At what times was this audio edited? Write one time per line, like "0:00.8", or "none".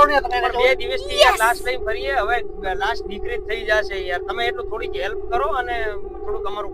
none